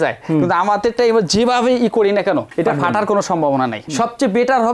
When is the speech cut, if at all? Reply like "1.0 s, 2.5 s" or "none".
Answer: 3.8 s